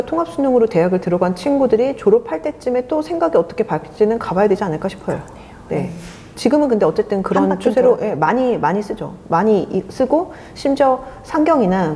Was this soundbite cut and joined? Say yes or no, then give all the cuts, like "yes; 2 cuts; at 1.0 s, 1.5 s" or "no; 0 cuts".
no; 0 cuts